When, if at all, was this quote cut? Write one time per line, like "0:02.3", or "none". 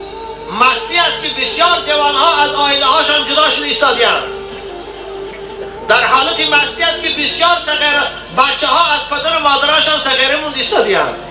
none